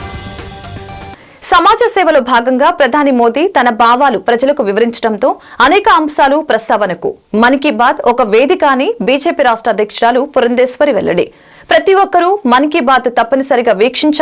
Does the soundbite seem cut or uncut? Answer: uncut